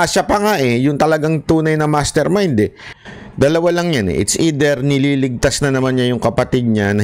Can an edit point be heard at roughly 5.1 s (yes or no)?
no